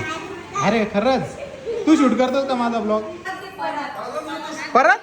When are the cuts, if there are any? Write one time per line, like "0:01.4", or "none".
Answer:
0:03.2